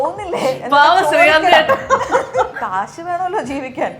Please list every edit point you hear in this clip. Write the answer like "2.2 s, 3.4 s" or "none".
2.5 s